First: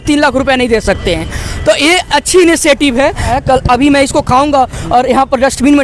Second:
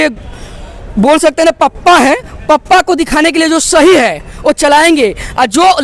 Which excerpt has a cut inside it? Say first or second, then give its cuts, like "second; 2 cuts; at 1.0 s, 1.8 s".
first; 1 cut; at 3.3 s